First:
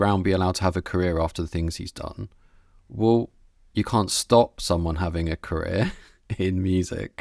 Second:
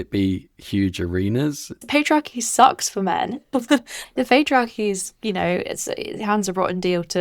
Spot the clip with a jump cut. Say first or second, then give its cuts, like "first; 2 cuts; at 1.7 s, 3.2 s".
second; 2 cuts; at 1.8 s, 4.0 s